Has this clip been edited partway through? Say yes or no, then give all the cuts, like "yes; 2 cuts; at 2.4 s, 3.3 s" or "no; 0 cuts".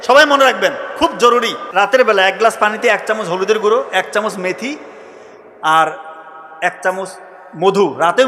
yes; 1 cut; at 1.6 s